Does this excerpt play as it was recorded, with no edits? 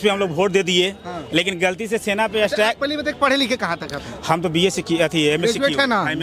yes; 0 cuts

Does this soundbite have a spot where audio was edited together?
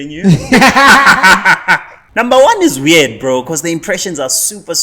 yes; 1 cut; at 2.0 s

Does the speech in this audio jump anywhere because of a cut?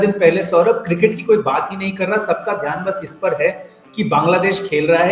no; 0 cuts

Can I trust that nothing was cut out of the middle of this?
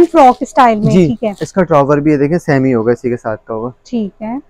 yes; 0 cuts

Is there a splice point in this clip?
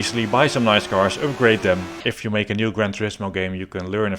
yes; 1 cut; at 2.0 s

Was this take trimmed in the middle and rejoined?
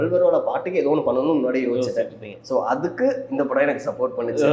no; 0 cuts

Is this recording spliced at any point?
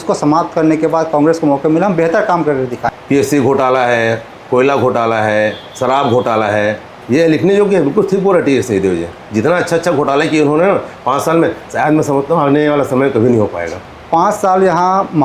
yes; 2 cuts; at 2.9 s, 13.7 s

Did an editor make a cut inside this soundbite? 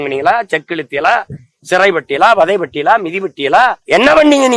no; 0 cuts

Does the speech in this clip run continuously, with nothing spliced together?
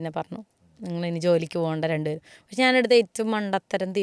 yes; 0 cuts

